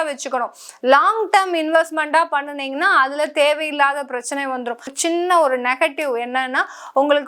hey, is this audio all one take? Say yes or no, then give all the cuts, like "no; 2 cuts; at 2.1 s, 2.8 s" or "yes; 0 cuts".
no; 1 cut; at 4.9 s